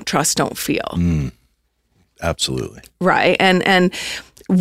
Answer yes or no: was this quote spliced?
no